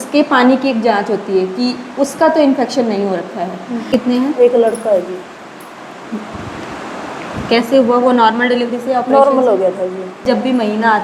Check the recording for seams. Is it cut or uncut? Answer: cut